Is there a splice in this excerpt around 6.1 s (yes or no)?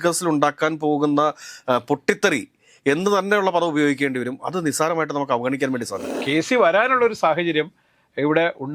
yes